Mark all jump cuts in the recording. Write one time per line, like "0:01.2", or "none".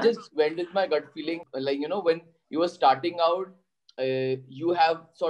0:01.4